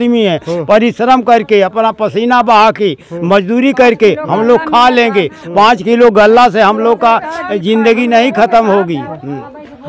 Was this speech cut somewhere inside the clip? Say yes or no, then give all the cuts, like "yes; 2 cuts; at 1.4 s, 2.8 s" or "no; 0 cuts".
no; 0 cuts